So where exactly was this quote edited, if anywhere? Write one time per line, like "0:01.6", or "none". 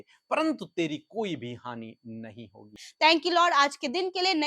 0:02.9